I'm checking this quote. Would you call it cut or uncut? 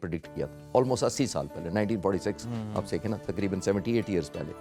uncut